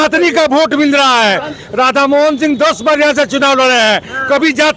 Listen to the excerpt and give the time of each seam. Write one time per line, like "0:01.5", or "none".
none